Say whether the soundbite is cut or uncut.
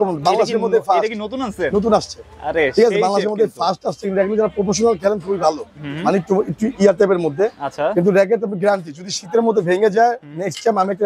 uncut